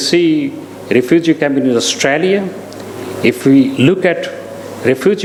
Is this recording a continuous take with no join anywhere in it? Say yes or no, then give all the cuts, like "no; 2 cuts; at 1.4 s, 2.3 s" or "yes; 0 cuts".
yes; 0 cuts